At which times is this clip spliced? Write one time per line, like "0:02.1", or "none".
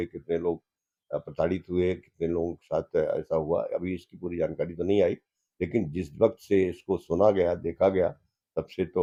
none